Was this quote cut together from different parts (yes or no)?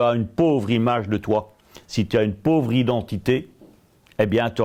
no